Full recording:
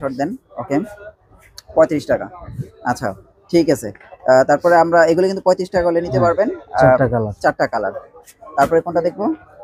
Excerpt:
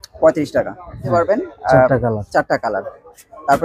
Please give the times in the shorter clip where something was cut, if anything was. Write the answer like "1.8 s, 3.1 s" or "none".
1.0 s